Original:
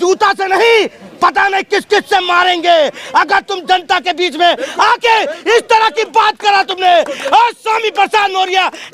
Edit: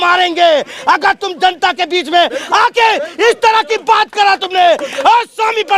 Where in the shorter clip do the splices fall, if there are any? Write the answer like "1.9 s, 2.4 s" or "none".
none